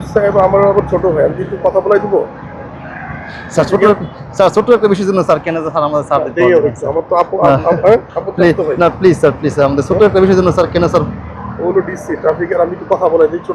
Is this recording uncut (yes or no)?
yes